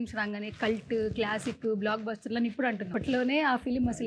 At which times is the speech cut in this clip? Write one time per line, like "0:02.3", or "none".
0:02.9

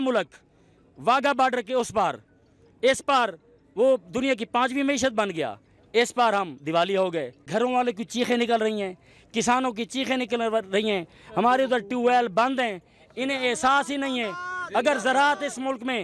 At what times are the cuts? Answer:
0:07.4

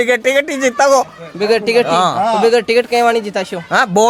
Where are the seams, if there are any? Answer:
none

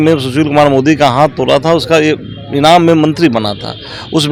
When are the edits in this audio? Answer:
none

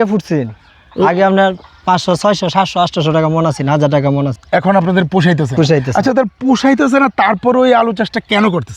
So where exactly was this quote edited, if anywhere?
0:04.4

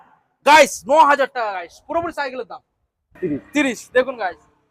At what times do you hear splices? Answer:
0:03.2

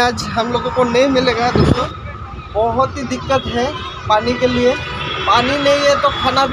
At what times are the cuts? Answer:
0:01.9

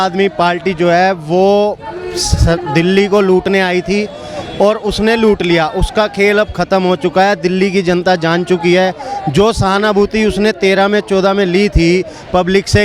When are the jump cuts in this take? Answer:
none

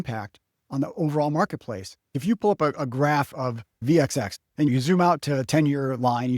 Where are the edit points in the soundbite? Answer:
0:02.0
0:03.7
0:04.7

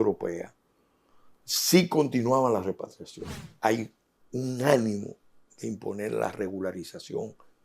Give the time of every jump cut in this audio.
0:03.5

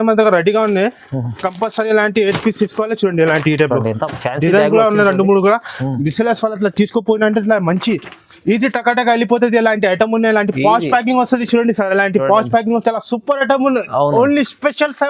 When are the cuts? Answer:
none

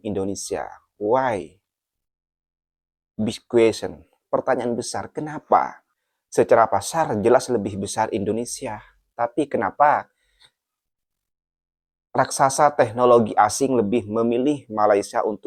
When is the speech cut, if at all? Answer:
none

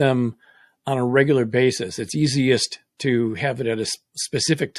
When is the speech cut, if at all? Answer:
none

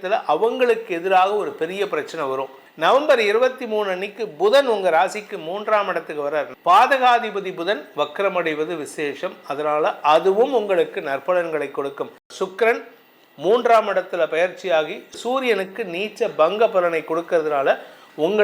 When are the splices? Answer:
0:02.6
0:06.5
0:12.2

